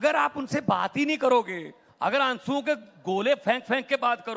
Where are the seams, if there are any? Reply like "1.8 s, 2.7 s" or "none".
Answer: none